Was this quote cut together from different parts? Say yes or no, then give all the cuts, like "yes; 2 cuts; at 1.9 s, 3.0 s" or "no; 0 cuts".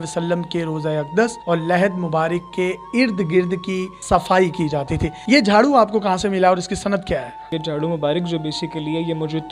no; 0 cuts